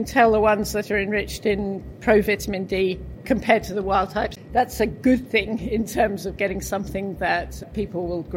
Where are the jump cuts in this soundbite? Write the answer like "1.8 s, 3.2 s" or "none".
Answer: 3.1 s, 4.3 s